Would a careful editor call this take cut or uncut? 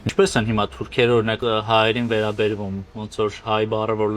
cut